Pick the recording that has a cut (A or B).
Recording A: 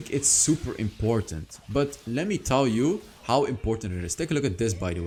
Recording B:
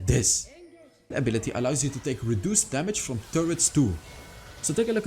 B